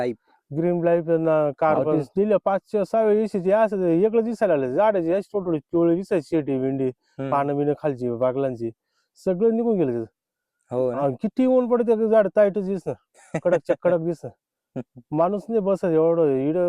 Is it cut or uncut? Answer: cut